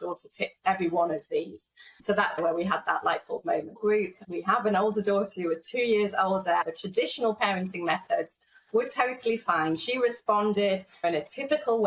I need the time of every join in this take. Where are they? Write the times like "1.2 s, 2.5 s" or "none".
2.4 s, 4.1 s, 6.7 s